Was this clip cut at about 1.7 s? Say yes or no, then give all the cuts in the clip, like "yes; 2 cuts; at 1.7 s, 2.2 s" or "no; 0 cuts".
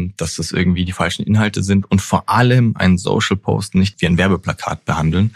no; 1 cut; at 3.9 s